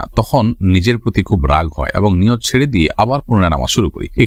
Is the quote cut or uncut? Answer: uncut